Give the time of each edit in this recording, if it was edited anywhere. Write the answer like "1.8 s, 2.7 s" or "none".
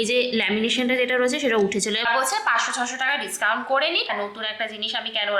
2.0 s, 4.1 s